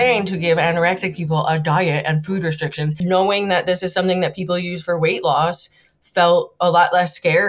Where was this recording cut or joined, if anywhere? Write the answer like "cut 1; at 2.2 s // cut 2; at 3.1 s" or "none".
cut 1; at 3.0 s